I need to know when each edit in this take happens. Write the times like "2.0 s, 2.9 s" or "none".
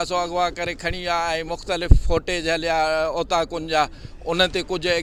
none